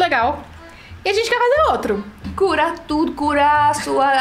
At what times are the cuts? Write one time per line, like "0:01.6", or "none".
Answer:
0:02.2